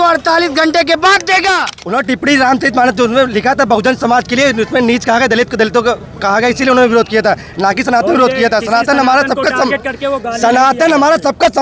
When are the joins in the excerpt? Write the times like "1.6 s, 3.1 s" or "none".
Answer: 1.7 s